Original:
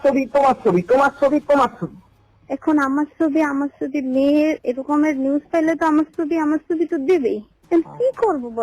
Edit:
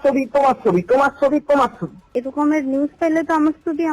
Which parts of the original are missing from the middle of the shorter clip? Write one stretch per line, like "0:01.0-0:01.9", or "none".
0:02.1-0:04.6